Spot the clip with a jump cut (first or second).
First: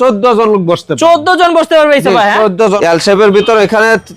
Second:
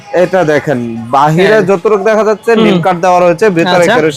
first